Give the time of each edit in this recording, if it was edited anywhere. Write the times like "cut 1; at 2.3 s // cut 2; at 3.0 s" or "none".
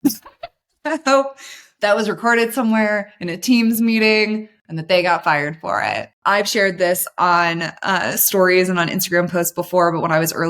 cut 1; at 6.1 s